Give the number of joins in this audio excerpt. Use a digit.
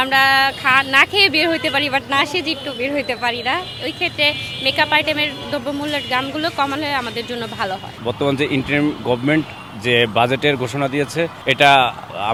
0